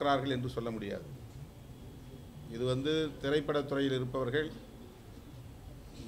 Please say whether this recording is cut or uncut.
uncut